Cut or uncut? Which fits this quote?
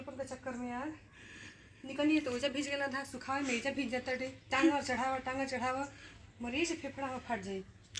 uncut